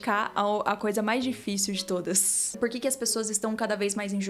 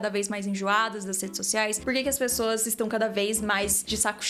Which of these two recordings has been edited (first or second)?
first